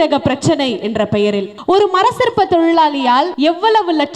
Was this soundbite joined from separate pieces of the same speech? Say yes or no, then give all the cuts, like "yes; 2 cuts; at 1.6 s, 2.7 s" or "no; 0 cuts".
yes; 2 cuts; at 1.5 s, 3.3 s